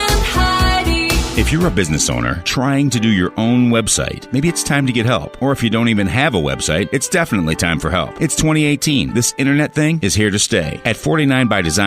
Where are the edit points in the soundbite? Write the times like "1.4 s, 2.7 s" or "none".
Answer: 1.2 s